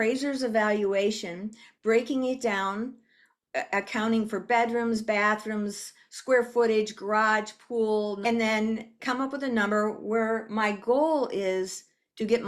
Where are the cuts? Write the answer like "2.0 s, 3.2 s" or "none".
8.2 s, 8.9 s